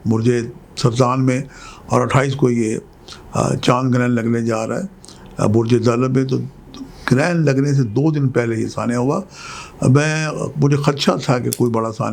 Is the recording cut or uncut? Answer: uncut